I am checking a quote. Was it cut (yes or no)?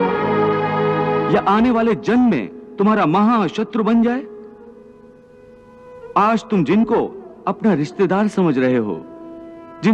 no